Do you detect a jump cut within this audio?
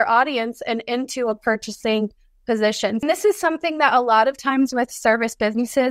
yes; 1 cut; at 3.0 s

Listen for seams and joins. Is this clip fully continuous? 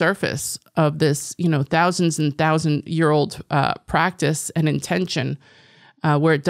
yes; 0 cuts

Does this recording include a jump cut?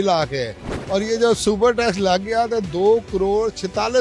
no; 0 cuts

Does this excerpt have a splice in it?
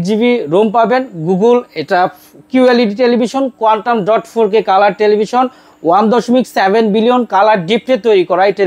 no; 0 cuts

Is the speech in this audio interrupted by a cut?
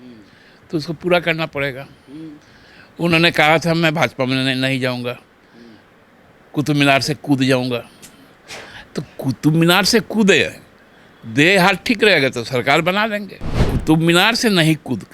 yes; 1 cut; at 13.7 s

